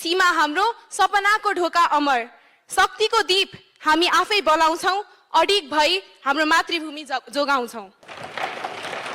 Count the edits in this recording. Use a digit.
1